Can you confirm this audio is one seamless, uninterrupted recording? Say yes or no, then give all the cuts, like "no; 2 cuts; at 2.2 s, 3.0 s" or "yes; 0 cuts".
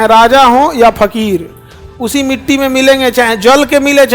yes; 0 cuts